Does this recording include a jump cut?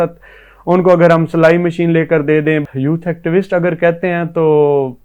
yes; 1 cut; at 2.6 s

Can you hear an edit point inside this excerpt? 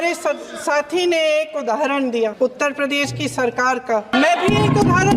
yes; 2 cuts; at 2.6 s, 4.1 s

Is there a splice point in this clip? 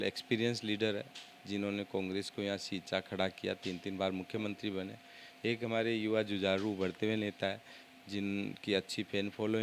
no; 0 cuts

